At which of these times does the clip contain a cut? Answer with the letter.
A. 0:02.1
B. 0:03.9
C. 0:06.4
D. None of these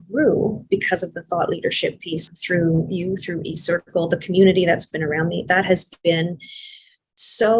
A